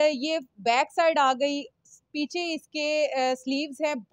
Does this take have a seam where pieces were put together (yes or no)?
no